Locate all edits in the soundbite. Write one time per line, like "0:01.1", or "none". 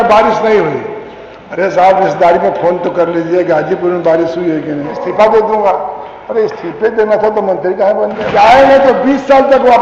0:05.0
0:08.3